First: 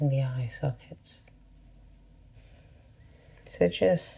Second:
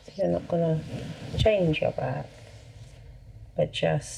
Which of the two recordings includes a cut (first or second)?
first